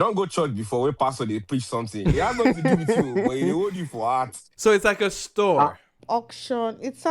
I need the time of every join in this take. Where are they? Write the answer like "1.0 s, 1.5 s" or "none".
4.4 s, 5.9 s